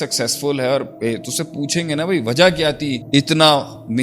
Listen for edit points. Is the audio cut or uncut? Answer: cut